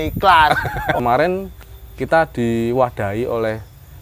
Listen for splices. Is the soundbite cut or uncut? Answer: cut